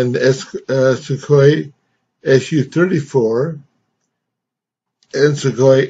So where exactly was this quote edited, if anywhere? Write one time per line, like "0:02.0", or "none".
none